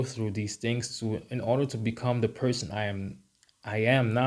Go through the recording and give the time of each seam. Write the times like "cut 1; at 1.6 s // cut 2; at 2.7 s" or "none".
none